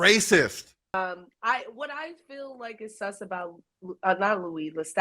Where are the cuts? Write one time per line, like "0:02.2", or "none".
0:01.0